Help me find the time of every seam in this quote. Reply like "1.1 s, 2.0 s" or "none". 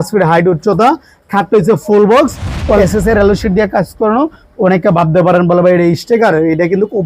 2.8 s